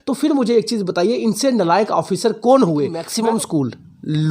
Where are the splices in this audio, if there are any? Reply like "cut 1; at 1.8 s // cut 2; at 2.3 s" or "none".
cut 1; at 3.1 s